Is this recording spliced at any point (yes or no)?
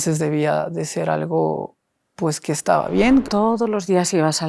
yes